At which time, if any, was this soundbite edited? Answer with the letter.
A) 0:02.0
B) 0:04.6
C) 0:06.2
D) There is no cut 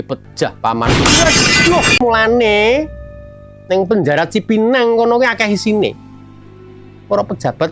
A